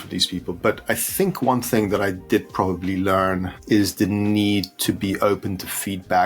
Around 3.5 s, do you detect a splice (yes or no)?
yes